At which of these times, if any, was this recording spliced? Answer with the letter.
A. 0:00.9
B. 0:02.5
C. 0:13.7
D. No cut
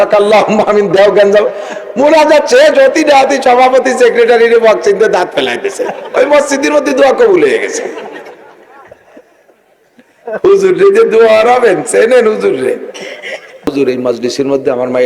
C